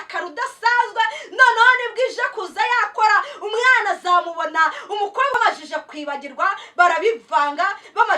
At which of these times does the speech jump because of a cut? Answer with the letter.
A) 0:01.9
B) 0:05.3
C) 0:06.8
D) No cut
B